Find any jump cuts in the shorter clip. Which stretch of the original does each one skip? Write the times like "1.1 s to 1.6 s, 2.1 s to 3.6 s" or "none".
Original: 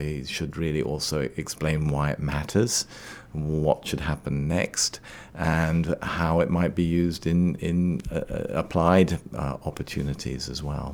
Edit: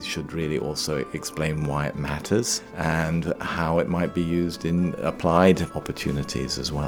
2.9 s to 5.2 s, 7.6 s to 8.5 s, 9.2 s to 9.6 s